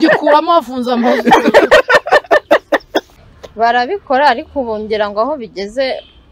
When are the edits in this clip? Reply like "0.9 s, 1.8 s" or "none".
3.1 s